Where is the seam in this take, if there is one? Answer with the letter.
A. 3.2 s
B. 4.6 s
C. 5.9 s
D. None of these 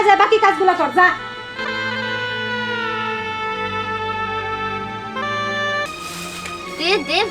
C